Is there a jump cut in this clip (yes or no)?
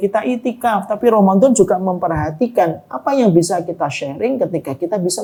no